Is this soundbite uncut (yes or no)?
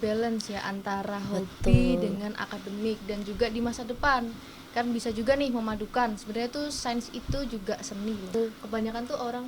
no